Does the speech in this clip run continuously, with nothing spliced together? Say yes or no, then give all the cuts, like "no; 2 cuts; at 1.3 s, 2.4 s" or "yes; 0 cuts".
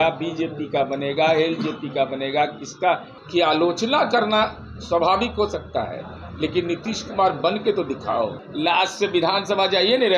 no; 2 cuts; at 3.1 s, 8.4 s